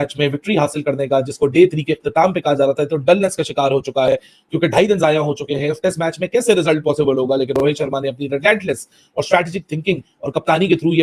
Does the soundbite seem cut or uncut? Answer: uncut